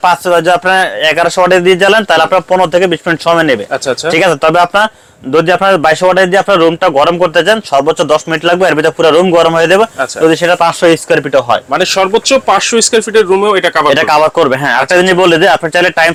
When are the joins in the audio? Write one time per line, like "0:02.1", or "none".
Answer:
none